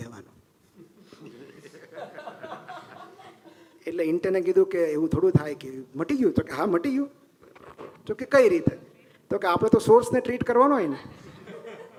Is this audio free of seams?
yes; 0 cuts

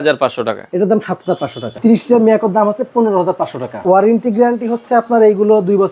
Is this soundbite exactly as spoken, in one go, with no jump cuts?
no; 2 cuts; at 1.8 s, 3.8 s

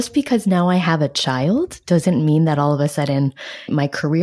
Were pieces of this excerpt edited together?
no; 0 cuts

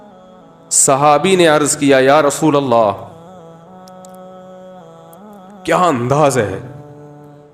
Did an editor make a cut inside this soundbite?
yes; 4 cuts; at 0.8 s, 3.1 s, 5.6 s, 6.7 s

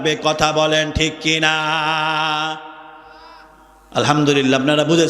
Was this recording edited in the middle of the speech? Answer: no; 0 cuts

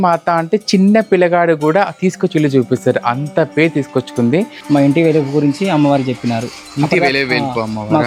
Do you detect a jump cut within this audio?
yes; 1 cut; at 4.6 s

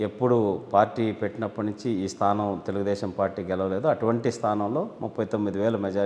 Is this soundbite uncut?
yes; 0 cuts

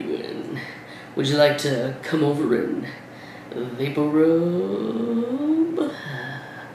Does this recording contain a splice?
no; 0 cuts

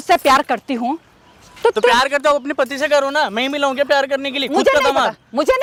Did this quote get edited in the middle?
no; 0 cuts

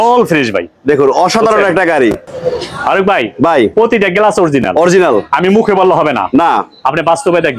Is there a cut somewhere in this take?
no; 0 cuts

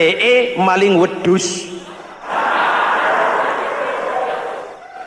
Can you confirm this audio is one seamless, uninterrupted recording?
yes; 0 cuts

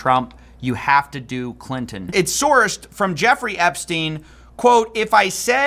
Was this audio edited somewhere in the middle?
yes; 1 cut; at 2.0 s

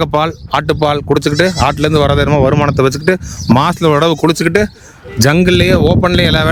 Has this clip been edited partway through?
no; 0 cuts

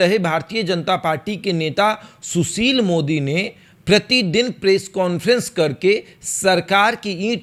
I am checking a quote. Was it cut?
no; 0 cuts

